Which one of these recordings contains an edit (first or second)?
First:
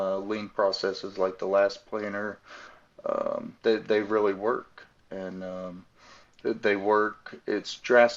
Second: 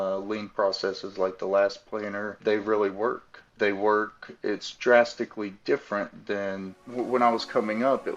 second